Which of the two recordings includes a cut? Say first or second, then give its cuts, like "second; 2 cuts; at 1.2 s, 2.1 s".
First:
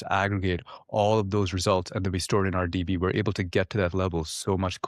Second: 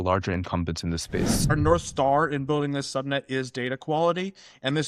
second; 1 cut; at 1.5 s